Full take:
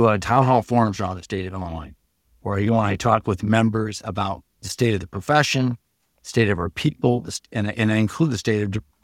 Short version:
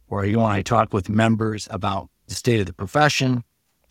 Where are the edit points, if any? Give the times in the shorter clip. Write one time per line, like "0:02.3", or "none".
none